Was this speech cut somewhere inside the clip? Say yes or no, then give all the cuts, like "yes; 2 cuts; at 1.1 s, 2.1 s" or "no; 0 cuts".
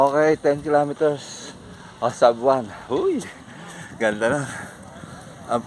no; 0 cuts